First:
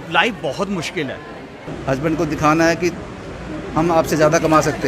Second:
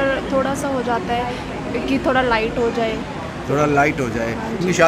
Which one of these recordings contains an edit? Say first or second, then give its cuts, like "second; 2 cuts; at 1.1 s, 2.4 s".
first; 1 cut; at 1.6 s